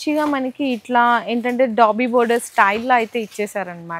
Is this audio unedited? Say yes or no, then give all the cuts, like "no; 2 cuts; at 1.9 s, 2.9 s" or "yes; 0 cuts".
yes; 0 cuts